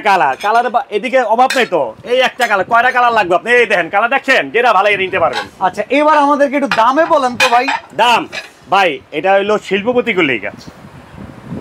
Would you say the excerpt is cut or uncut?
uncut